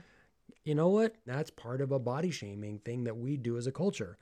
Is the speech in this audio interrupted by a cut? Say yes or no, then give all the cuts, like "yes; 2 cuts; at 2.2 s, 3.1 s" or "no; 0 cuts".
yes; 1 cut; at 1.3 s